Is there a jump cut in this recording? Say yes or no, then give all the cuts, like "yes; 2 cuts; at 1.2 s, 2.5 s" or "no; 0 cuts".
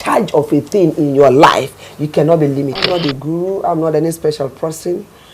yes; 1 cut; at 2.8 s